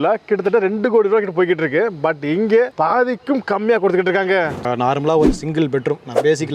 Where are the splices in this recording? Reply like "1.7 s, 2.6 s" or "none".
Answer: 4.6 s